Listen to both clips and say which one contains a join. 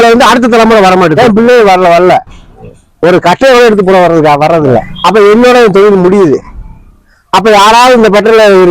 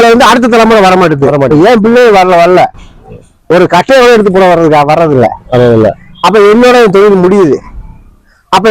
first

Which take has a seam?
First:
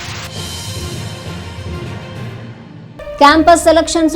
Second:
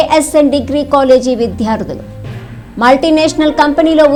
first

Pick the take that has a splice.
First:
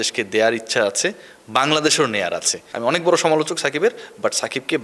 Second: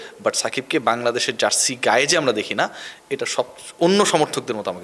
first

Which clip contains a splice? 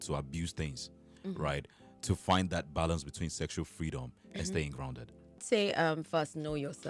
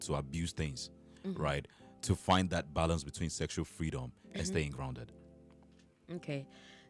first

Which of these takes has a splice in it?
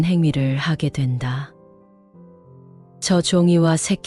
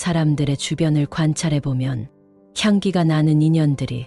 first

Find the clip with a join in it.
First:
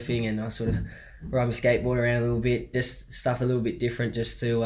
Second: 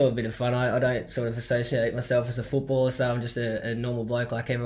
first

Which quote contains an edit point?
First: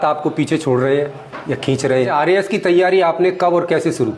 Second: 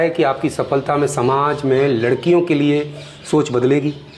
first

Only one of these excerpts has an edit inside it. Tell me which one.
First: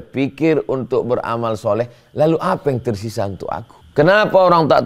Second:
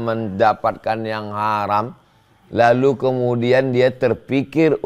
first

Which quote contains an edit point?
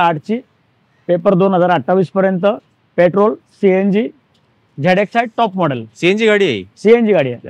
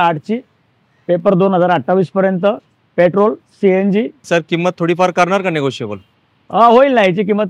second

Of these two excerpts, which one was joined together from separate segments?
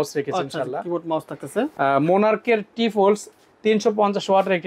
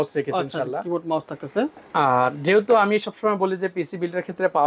first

